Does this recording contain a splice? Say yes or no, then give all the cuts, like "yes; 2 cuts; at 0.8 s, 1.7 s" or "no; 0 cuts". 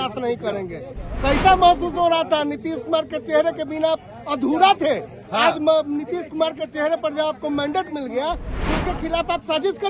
no; 0 cuts